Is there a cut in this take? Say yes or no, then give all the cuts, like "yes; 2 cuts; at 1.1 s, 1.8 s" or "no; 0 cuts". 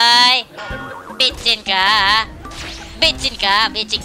no; 0 cuts